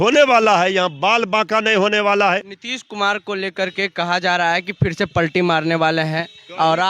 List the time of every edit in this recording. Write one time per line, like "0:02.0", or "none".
0:02.6

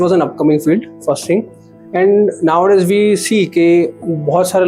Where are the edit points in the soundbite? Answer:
none

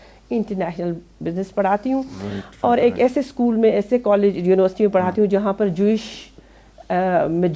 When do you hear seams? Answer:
none

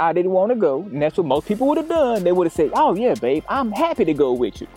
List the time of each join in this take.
none

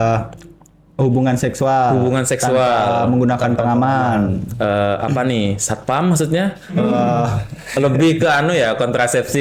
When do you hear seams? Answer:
none

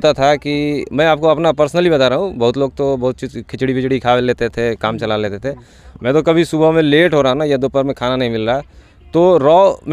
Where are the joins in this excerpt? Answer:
none

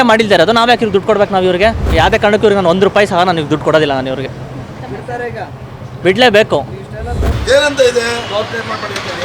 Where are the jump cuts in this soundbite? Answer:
0:01.9
0:07.3

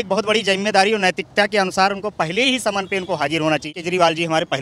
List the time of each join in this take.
0:03.7

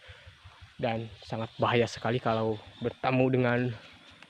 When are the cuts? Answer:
none

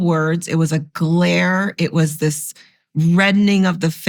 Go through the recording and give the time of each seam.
none

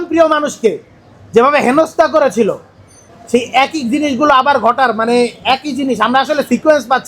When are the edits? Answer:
0:03.1

